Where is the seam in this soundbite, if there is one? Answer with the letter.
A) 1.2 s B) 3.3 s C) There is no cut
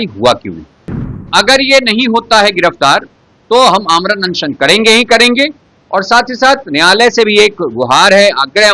A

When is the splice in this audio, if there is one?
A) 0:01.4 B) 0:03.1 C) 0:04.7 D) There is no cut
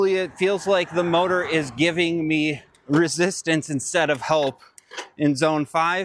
D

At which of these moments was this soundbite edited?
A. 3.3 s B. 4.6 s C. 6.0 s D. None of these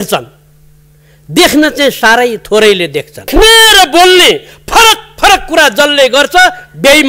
A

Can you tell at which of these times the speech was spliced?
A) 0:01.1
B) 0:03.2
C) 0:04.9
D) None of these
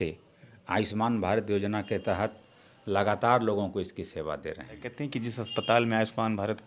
C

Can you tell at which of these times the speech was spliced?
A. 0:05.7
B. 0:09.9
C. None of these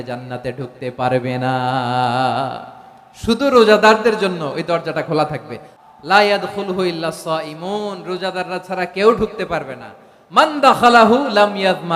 A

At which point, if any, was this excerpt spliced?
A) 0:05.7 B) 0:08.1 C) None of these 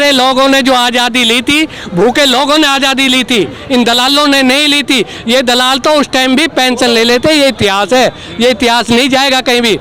C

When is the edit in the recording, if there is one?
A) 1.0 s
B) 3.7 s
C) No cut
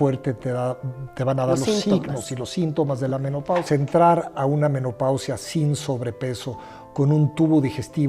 B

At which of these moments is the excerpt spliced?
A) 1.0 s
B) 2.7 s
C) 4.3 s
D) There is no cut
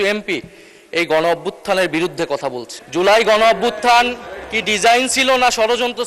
B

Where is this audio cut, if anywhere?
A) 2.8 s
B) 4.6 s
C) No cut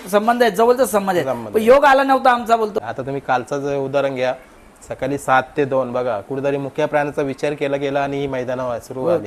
A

